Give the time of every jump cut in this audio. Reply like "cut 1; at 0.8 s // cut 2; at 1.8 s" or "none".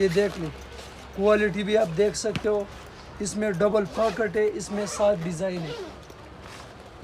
none

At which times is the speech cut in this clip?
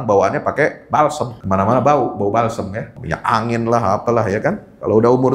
cut 1; at 1.3 s // cut 2; at 3.0 s

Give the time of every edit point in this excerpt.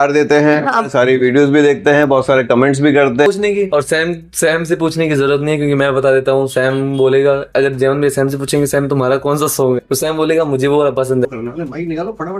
cut 1; at 3.3 s // cut 2; at 11.3 s

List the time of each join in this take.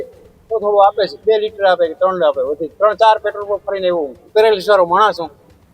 cut 1; at 1.2 s // cut 2; at 2.7 s // cut 3; at 4.2 s

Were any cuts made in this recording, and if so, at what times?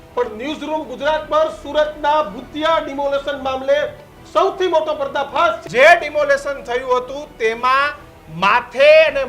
cut 1; at 5.6 s

